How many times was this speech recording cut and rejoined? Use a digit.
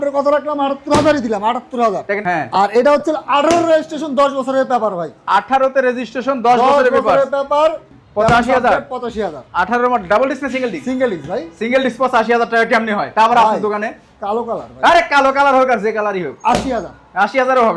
2